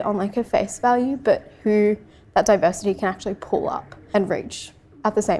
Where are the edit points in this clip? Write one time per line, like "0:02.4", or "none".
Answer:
0:03.9